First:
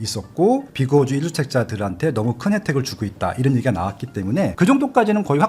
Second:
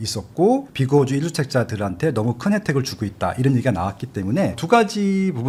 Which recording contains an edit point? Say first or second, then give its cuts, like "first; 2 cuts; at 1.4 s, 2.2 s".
first; 1 cut; at 4.5 s